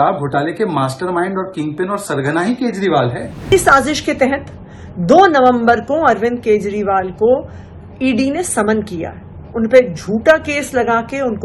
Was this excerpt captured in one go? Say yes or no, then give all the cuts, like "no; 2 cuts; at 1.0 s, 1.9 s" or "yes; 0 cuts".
no; 1 cut; at 3.5 s